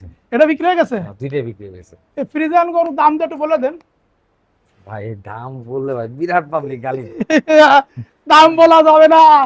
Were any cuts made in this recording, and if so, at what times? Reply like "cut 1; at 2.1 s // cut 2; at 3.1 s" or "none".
none